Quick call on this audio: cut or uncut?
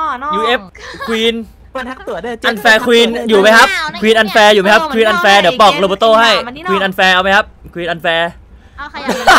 uncut